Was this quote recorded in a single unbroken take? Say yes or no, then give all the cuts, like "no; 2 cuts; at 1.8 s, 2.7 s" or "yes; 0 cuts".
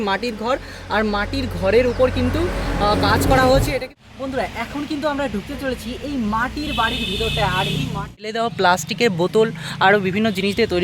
no; 2 cuts; at 4.1 s, 8.3 s